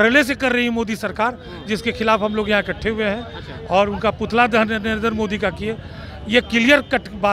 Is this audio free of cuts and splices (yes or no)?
yes